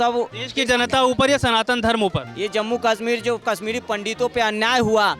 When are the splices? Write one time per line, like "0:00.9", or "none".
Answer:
0:02.3